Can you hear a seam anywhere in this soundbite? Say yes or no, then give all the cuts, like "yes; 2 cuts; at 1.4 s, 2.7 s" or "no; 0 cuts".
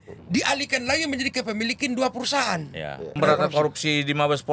yes; 1 cut; at 3.2 s